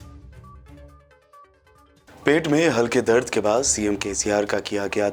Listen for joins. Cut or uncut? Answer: uncut